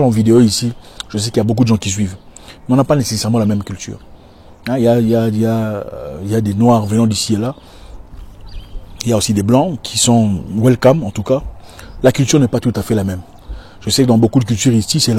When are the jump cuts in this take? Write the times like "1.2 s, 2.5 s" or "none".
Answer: none